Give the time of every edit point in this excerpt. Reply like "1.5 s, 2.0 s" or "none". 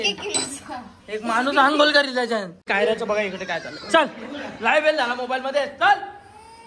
2.7 s